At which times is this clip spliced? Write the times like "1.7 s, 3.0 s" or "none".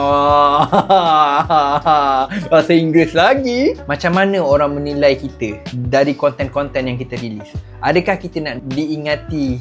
3.8 s